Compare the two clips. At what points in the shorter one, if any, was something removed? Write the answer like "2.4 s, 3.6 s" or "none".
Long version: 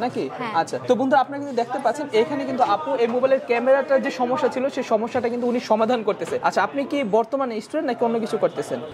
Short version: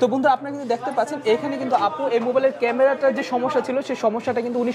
none